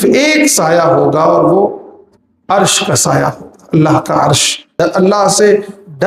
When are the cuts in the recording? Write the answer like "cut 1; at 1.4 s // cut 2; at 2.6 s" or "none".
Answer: cut 1; at 4.8 s